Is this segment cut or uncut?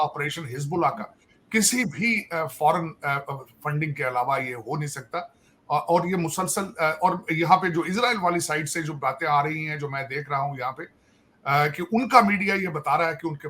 uncut